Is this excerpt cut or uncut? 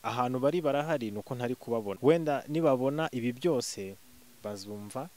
cut